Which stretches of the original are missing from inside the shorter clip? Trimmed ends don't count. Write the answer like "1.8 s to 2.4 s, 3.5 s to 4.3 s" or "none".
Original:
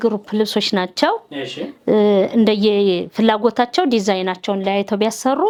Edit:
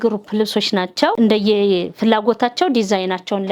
1.1 s to 2.3 s